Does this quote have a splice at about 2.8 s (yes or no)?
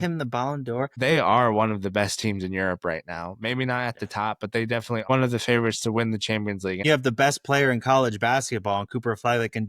no